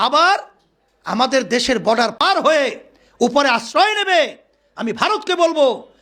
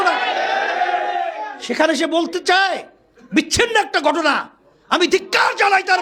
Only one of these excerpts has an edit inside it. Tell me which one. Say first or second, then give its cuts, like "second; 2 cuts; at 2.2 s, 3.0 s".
first; 1 cut; at 2.2 s